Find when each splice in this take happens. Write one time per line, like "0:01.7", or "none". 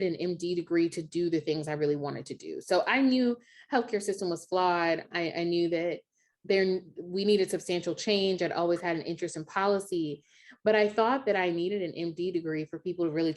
0:05.1
0:06.3